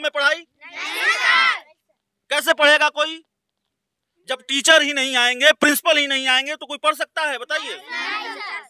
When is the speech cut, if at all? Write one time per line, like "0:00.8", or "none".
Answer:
none